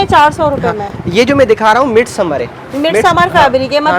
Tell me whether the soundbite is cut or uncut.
uncut